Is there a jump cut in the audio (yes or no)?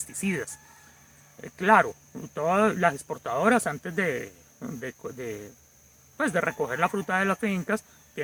no